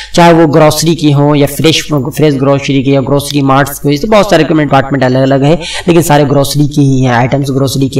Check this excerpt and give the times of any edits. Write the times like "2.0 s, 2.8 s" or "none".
4.7 s